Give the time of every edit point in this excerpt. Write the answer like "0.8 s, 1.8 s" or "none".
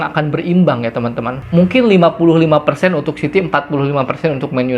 1.3 s